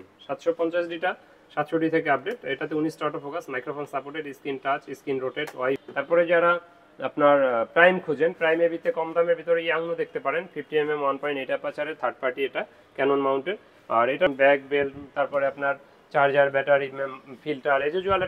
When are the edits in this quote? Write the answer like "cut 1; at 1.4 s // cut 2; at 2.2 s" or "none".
cut 1; at 5.8 s // cut 2; at 14.3 s

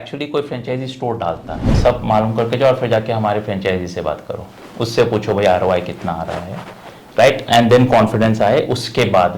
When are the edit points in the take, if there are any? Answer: cut 1; at 1.7 s

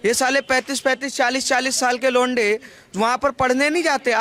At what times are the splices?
none

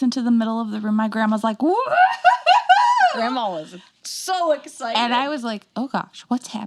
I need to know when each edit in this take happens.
none

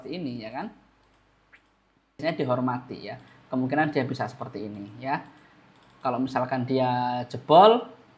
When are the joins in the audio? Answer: cut 1; at 2.2 s

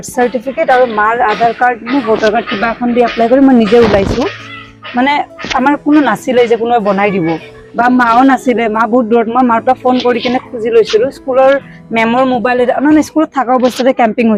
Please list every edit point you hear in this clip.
none

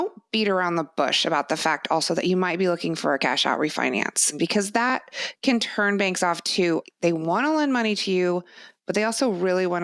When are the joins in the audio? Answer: cut 1; at 4.4 s // cut 2; at 6.8 s

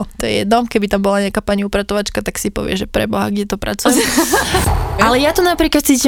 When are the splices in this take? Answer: cut 1; at 4.7 s

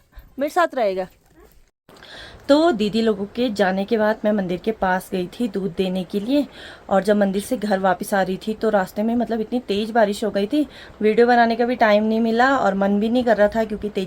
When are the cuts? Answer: cut 1; at 1.7 s

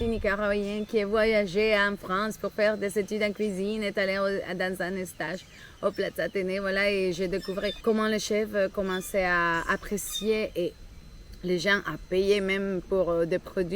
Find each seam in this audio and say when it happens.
none

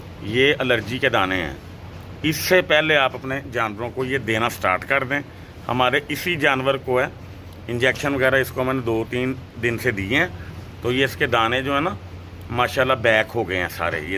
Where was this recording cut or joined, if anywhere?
none

